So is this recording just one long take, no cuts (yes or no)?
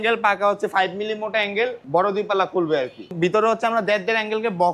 no